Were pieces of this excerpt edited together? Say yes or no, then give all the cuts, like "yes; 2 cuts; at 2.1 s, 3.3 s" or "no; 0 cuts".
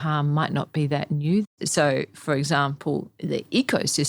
yes; 1 cut; at 1.4 s